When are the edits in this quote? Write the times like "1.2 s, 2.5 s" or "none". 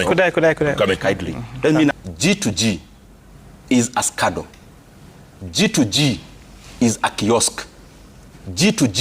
1.9 s